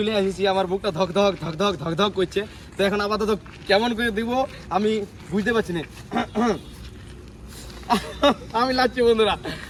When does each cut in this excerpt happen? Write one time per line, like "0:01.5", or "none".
none